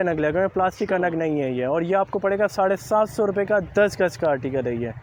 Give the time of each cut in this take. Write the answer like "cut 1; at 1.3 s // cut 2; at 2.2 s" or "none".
none